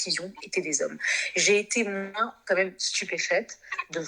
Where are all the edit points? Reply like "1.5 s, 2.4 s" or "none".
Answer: none